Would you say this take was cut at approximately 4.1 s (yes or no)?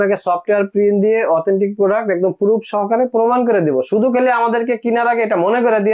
no